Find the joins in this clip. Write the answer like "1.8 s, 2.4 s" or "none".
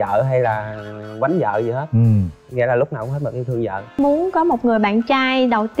4.0 s